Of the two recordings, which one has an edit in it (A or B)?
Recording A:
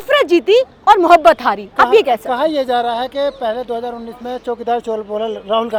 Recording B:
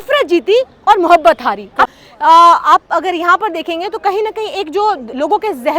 B